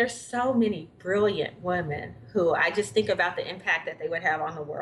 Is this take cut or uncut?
uncut